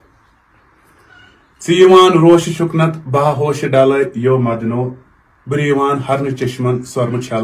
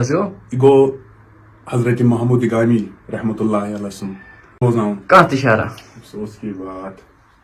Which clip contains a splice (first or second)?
second